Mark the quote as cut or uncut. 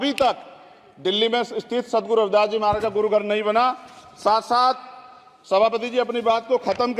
uncut